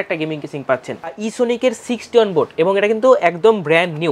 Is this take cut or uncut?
cut